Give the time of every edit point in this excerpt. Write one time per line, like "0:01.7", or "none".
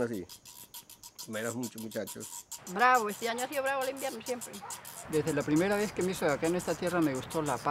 0:02.7
0:05.0